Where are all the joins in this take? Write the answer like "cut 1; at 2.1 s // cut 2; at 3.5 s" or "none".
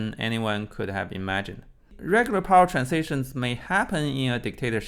cut 1; at 1.9 s

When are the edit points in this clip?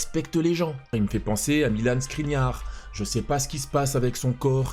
cut 1; at 0.9 s

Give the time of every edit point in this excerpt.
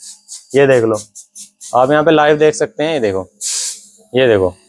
none

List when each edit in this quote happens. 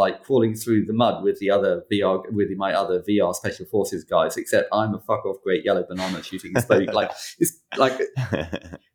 none

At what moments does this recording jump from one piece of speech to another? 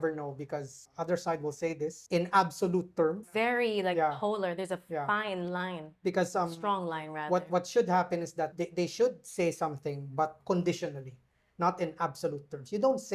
cut 1; at 0.8 s // cut 2; at 2.0 s // cut 3; at 3.2 s // cut 4; at 8.5 s // cut 5; at 10.4 s

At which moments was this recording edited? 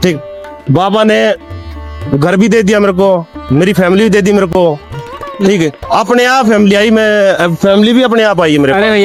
none

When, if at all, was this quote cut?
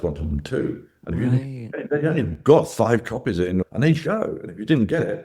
cut 1; at 3.7 s

